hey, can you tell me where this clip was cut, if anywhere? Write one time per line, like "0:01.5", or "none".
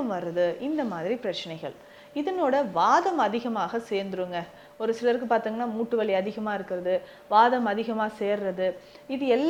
none

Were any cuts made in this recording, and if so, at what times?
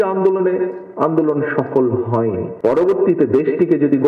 0:02.5

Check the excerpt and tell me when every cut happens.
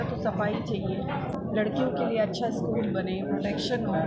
0:01.3

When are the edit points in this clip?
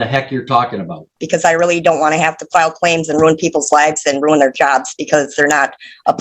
0:01.2

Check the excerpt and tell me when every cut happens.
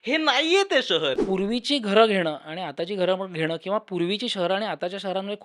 0:01.2

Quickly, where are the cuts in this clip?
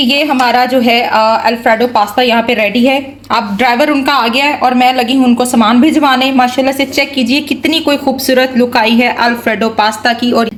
none

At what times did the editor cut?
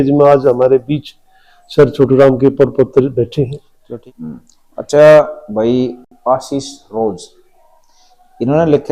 none

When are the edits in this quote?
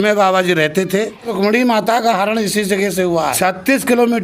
0:01.3
0:03.3

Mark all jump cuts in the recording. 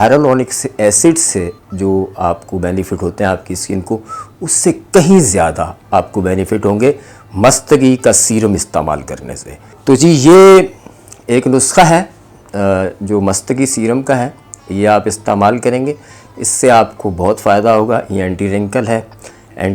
none

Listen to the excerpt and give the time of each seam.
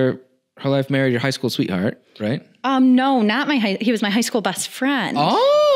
none

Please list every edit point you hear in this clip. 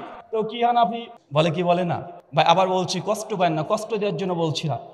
0:01.1
0:02.2

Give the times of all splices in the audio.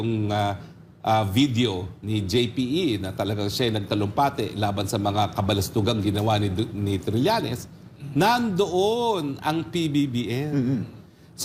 none

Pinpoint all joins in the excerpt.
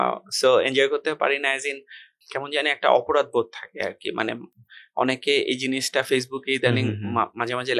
none

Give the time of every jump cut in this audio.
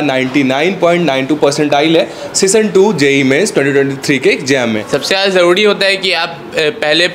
0:04.8

